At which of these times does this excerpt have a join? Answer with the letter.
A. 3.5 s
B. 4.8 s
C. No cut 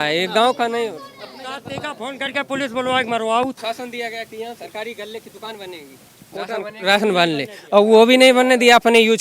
A